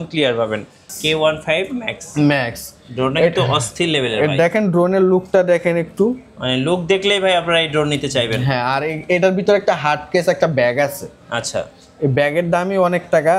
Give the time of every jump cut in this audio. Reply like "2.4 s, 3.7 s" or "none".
0.9 s